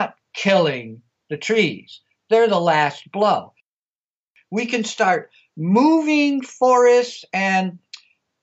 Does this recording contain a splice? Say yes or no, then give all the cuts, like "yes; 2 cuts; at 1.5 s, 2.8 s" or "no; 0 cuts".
yes; 1 cut; at 4.0 s